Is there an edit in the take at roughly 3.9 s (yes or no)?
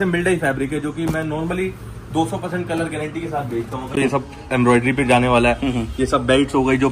yes